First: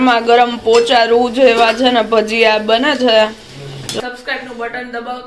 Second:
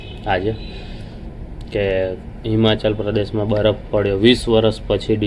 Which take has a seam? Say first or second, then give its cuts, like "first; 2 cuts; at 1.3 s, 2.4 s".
first; 1 cut; at 4.0 s